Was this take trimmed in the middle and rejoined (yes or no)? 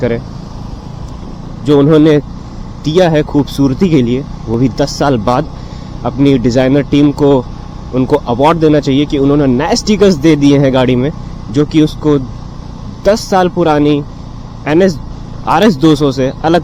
no